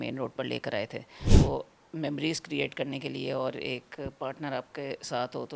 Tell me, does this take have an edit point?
yes; 1 cut; at 1.2 s

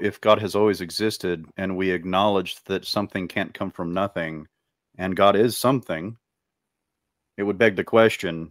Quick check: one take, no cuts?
yes; 0 cuts

